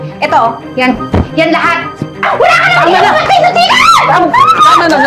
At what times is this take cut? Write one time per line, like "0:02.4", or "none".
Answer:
0:02.2